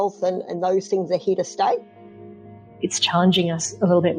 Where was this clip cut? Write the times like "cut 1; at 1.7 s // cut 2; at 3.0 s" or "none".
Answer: cut 1; at 2.1 s